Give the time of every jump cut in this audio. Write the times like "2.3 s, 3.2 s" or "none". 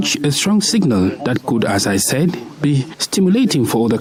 none

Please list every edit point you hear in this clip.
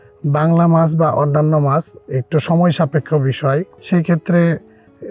3.8 s

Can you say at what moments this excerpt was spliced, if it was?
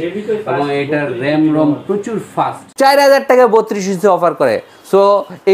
2.6 s

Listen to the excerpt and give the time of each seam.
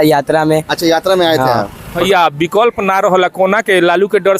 2.0 s

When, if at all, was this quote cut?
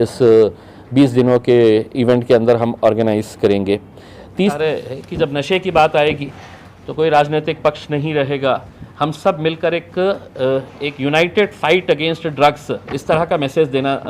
4.6 s

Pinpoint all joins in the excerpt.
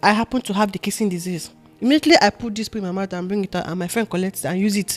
none

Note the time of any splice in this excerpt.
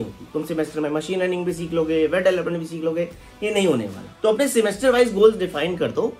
4.0 s

